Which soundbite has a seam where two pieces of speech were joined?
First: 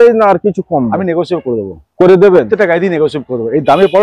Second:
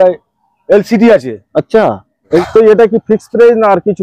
second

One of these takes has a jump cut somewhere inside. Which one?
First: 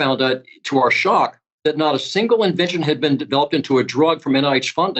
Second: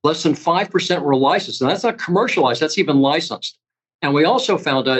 first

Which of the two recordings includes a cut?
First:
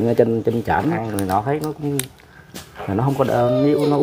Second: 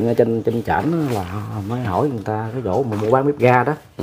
first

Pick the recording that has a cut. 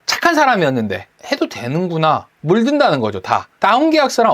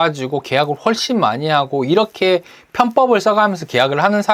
first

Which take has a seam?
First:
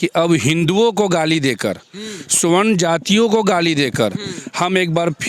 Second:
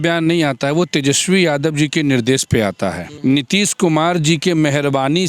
second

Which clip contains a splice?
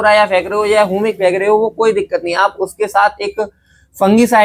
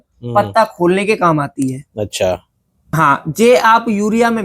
second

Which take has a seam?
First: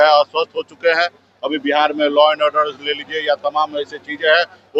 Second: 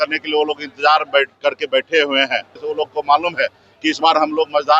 second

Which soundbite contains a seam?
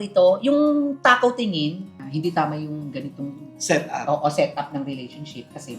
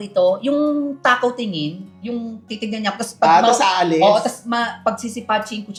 first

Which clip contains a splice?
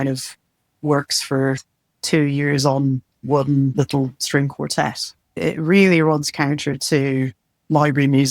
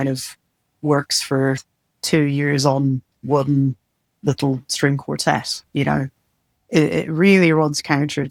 first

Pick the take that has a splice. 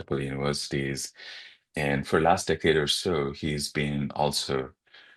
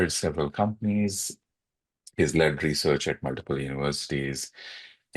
second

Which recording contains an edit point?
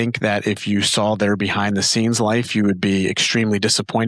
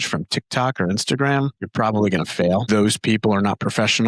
second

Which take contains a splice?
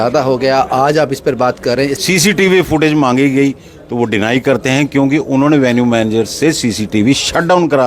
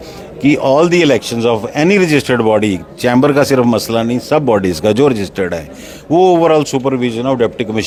first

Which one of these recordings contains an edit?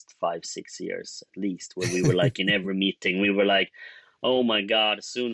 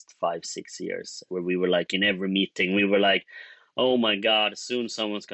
second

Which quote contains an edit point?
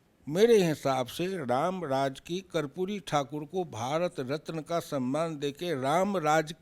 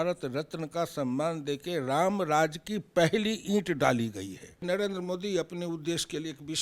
second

